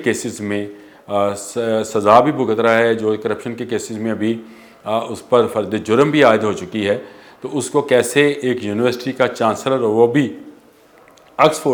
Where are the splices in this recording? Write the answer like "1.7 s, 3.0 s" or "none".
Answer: none